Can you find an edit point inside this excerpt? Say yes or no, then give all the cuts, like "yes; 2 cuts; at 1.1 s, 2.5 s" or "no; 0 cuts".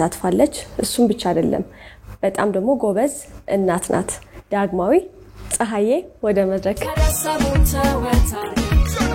yes; 2 cuts; at 4.3 s, 6.9 s